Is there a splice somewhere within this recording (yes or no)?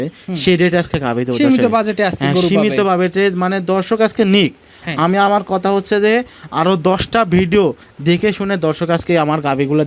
no